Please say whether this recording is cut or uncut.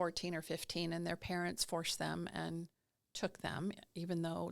uncut